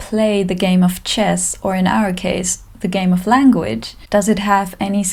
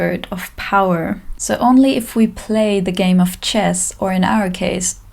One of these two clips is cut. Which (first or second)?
second